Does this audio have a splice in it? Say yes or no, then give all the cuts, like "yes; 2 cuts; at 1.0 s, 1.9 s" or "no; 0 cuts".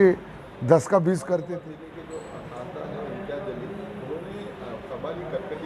yes; 1 cut; at 1.5 s